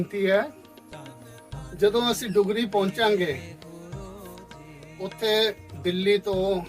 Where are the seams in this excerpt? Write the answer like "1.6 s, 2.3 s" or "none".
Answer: 3.4 s, 4.9 s